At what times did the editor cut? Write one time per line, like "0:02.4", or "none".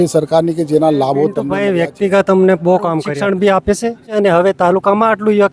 0:01.5
0:03.1
0:04.2

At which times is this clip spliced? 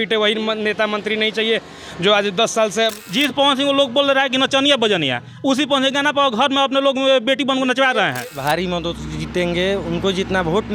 0:03.0
0:08.3

